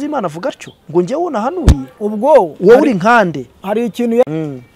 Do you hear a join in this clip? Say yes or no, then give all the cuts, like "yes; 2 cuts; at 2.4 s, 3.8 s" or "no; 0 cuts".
no; 0 cuts